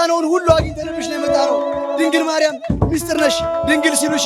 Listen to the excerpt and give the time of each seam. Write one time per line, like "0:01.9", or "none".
none